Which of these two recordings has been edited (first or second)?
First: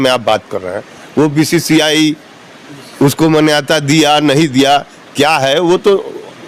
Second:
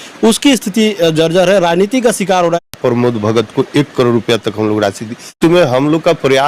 second